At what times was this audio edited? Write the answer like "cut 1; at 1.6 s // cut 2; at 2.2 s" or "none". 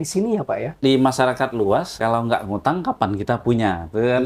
cut 1; at 0.8 s // cut 2; at 1.9 s